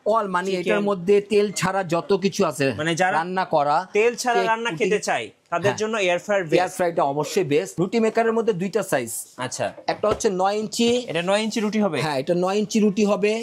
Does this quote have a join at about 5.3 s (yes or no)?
no